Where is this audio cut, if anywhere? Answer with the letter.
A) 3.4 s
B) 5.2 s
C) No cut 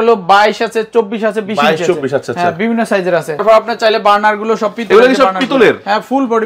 A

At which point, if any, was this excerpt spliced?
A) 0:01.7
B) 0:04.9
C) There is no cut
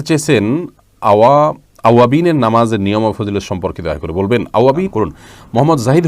B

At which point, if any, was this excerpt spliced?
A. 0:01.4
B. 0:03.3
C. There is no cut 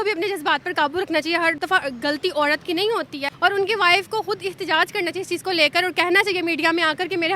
B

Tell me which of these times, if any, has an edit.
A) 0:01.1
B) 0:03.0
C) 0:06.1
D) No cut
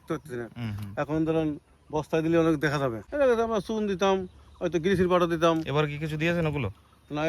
B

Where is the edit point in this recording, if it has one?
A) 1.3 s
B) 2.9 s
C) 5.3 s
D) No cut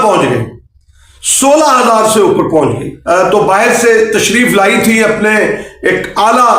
B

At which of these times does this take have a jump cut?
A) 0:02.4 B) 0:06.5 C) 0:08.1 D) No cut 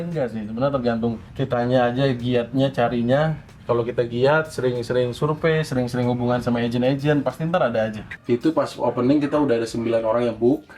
C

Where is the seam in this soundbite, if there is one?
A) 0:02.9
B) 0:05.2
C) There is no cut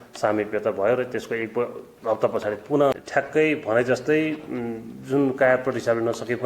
A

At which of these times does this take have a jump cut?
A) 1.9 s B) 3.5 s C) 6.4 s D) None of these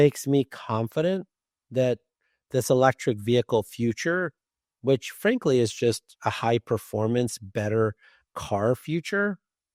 D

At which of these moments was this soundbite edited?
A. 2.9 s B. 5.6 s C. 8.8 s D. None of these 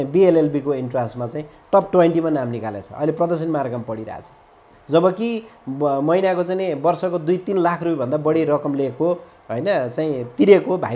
D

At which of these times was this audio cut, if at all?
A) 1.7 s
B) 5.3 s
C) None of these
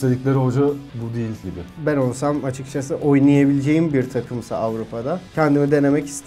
A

